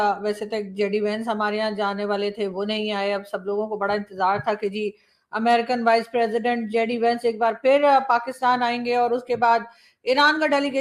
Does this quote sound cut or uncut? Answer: uncut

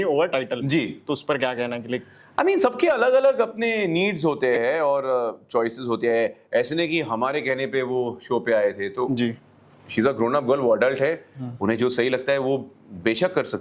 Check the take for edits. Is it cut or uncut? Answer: uncut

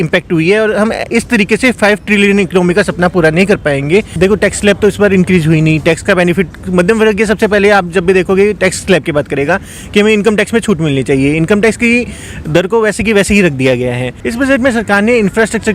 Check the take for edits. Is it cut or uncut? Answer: cut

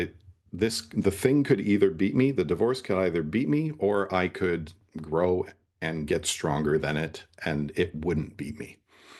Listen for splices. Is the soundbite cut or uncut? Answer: uncut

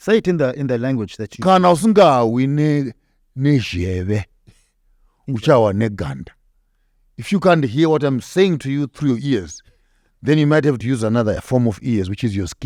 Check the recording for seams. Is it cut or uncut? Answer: uncut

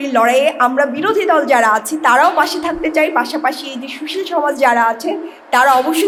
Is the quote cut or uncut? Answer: uncut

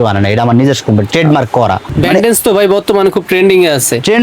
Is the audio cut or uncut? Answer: cut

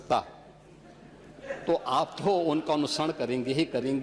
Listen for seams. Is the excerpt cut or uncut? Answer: uncut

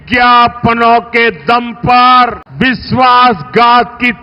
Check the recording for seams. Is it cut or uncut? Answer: cut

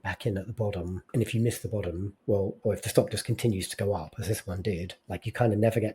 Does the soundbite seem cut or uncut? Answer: cut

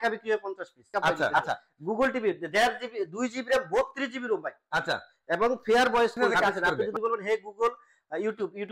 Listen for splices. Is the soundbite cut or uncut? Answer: cut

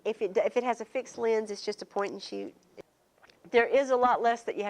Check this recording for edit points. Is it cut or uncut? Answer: cut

